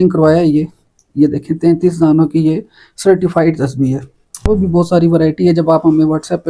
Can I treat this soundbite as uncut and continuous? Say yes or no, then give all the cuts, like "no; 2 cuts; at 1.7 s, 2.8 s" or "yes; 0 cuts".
no; 1 cut; at 4.4 s